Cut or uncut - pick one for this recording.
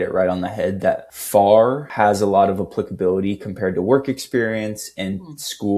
cut